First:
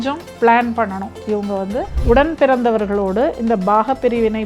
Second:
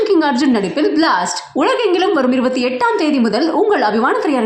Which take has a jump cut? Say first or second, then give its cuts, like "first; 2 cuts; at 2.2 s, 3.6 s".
first; 1 cut; at 2.0 s